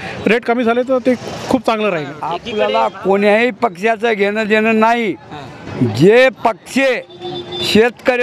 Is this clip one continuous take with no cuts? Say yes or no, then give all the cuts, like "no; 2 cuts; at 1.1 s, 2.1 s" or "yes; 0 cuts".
no; 1 cut; at 2.4 s